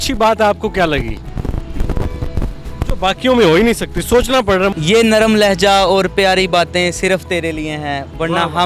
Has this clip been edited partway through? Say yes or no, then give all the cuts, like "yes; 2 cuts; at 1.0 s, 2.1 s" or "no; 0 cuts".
yes; 2 cuts; at 1.2 s, 4.7 s